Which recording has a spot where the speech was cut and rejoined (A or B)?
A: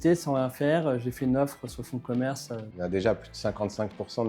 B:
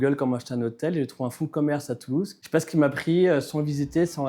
A